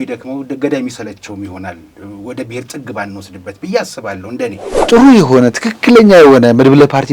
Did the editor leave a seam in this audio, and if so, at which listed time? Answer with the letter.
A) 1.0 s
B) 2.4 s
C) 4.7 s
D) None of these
C